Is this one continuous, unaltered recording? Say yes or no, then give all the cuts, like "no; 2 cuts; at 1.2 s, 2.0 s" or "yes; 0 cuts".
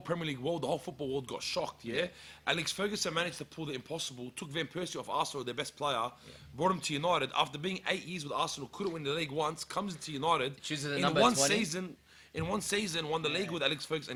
yes; 0 cuts